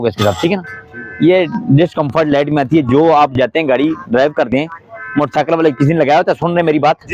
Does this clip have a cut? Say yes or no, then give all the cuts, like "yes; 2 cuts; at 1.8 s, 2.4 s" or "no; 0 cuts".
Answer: no; 0 cuts